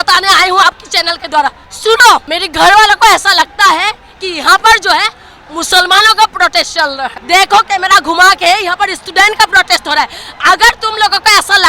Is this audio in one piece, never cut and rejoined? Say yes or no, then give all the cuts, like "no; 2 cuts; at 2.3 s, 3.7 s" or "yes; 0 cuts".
no; 3 cuts; at 1.7 s, 2.3 s, 7.1 s